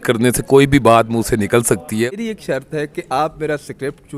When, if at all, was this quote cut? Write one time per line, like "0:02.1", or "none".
0:02.1